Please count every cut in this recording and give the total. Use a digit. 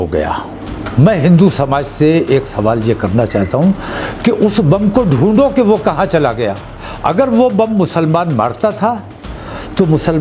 0